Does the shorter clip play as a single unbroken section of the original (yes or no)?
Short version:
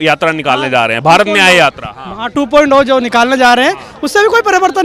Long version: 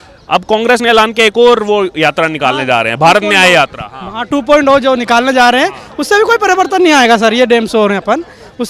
yes